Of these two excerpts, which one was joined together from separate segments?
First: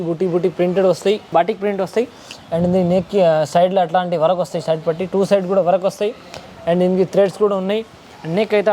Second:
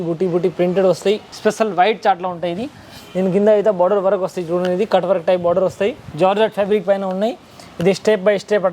second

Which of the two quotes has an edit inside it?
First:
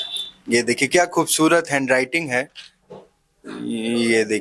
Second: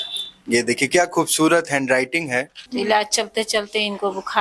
second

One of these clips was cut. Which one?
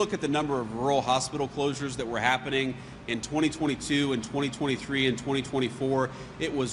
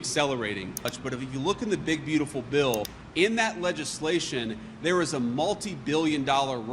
second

